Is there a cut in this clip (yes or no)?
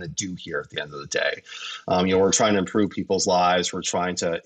no